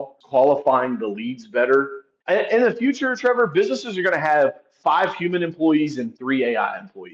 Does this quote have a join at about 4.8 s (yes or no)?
no